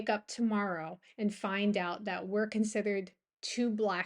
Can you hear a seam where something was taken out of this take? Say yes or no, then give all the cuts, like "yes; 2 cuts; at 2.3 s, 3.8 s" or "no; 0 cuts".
no; 0 cuts